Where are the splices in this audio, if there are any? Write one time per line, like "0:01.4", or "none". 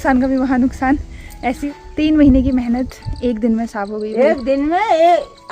0:01.6